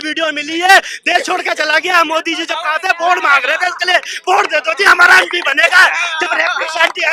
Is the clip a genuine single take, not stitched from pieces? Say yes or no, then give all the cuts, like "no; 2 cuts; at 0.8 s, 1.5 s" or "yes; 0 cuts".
yes; 0 cuts